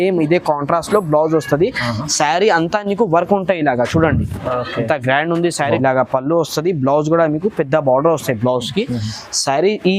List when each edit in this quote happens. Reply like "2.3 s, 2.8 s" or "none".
5.8 s